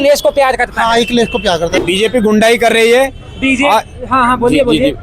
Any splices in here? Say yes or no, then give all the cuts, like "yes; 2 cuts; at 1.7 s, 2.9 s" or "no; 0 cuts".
yes; 1 cut; at 1.8 s